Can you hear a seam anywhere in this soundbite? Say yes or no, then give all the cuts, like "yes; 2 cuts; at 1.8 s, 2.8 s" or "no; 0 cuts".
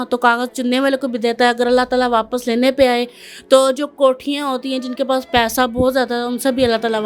no; 0 cuts